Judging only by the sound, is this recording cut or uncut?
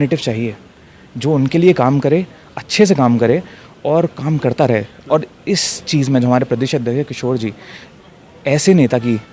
uncut